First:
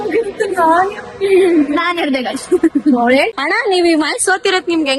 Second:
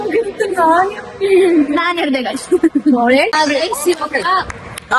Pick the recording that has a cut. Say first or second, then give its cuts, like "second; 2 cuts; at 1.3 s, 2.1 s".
first; 1 cut; at 3.3 s